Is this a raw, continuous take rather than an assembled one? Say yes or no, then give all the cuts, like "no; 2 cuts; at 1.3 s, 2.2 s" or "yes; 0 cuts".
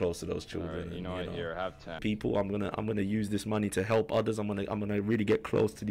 no; 1 cut; at 2.0 s